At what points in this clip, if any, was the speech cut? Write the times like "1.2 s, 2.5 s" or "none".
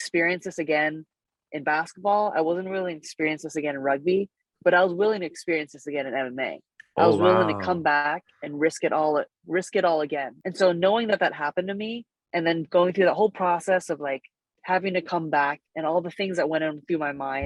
none